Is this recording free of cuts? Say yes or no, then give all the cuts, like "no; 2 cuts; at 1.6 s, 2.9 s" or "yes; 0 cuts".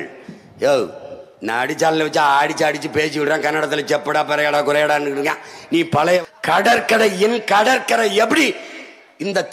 no; 1 cut; at 6.2 s